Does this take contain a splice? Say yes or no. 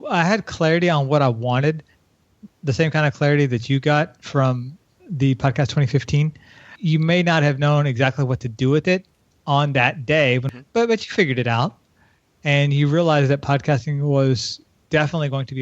yes